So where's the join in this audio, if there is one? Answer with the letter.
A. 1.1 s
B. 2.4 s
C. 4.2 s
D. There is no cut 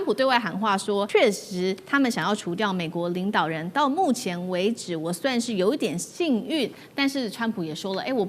A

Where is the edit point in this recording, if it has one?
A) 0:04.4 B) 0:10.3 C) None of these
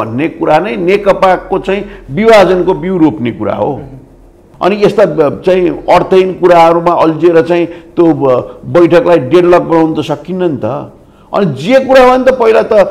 A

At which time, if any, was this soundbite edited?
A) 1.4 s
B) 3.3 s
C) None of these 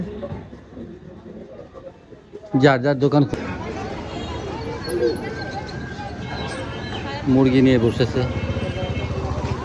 B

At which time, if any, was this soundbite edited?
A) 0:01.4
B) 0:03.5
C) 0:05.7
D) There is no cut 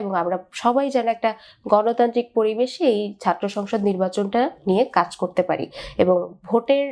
D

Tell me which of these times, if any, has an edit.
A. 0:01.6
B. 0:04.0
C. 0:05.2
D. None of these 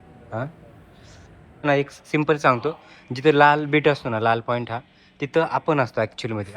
A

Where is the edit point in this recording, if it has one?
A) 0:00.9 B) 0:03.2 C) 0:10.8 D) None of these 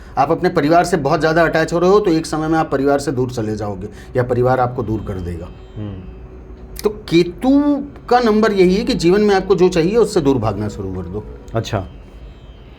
D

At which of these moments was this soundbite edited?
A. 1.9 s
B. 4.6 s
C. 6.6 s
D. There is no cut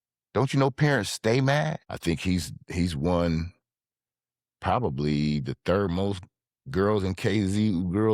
A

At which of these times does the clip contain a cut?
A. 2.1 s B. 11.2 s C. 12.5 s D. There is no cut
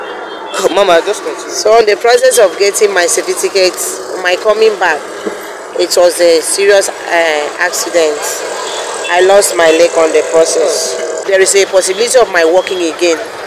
B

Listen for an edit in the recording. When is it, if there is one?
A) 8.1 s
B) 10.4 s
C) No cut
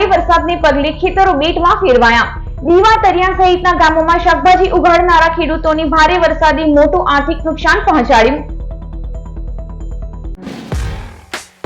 B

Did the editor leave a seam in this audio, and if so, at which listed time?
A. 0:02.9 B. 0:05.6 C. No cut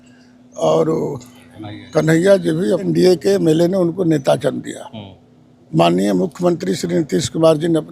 A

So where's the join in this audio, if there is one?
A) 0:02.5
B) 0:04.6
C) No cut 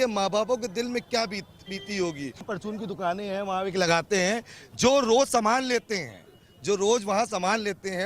A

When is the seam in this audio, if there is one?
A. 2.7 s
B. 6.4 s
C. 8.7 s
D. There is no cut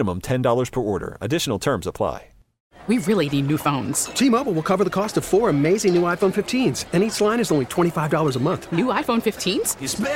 A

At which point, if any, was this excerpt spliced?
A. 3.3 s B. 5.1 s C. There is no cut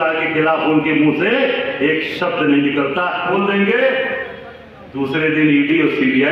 A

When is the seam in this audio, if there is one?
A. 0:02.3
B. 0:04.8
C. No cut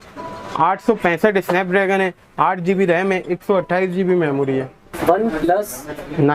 B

